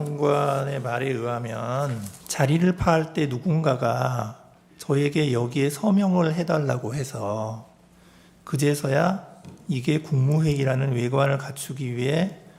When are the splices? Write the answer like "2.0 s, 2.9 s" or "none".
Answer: 2.2 s